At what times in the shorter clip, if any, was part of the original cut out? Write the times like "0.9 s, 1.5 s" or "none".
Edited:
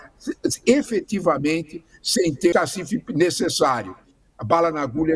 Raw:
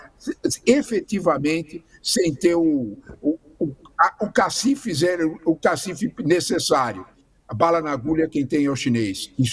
2.5 s